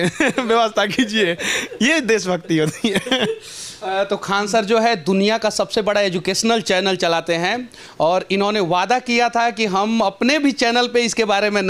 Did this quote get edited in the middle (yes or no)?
no